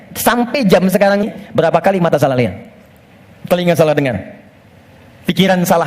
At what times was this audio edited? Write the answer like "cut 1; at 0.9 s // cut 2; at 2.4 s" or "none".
cut 1; at 1.2 s